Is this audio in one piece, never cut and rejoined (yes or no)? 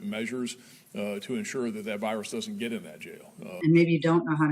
no